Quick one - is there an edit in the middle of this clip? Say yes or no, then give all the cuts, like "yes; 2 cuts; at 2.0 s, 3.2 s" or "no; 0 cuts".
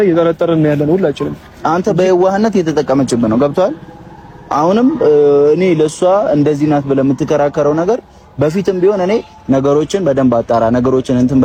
no; 0 cuts